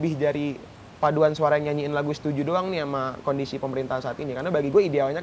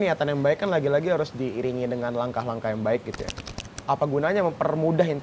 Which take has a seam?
second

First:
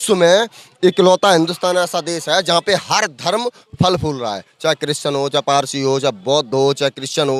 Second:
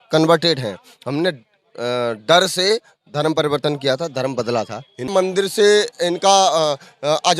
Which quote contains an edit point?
second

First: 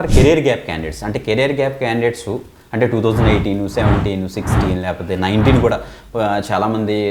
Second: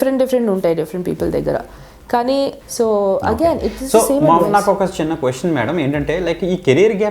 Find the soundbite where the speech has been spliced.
second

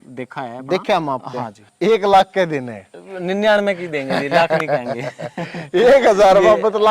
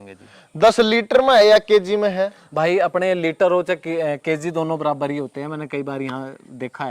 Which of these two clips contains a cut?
first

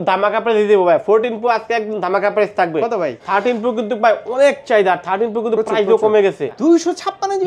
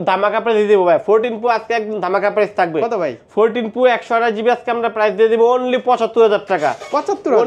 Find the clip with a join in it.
first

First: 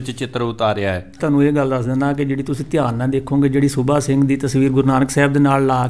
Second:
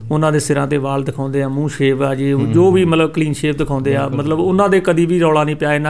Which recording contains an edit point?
first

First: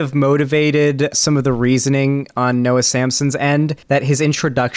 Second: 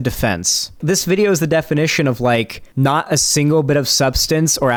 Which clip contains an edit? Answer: first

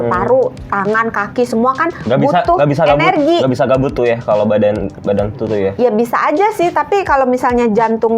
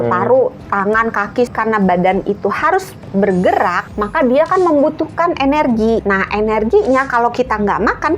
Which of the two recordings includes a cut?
second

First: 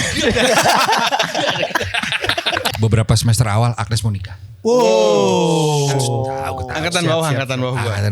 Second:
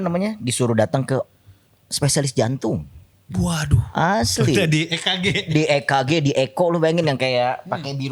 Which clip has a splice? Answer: first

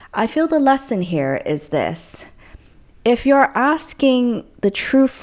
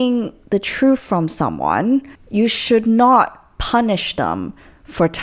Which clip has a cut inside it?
second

